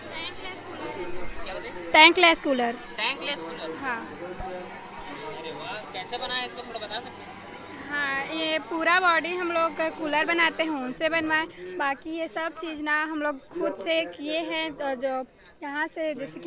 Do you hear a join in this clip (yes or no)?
no